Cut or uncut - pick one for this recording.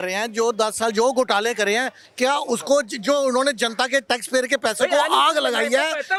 uncut